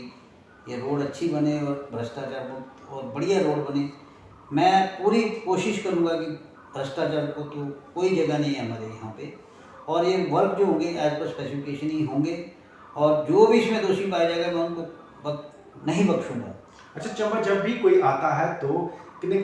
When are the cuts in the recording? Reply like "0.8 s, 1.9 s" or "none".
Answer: none